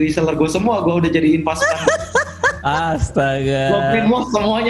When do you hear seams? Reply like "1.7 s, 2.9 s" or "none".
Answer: none

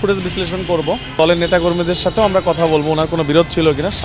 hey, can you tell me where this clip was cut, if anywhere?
1.2 s

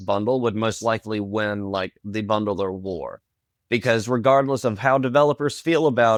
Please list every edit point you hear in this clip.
none

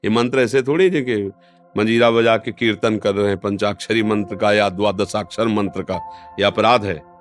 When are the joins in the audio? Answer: none

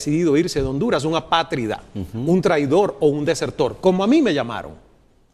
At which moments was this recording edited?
none

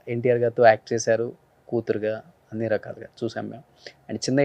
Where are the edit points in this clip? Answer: none

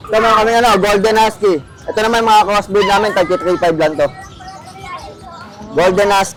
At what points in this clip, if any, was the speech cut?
none

